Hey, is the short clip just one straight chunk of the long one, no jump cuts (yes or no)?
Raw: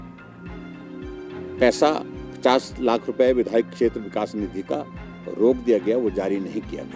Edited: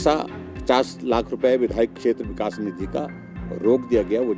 yes